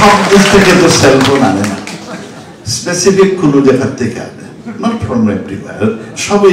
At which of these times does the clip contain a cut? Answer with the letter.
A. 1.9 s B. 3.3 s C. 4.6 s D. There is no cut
D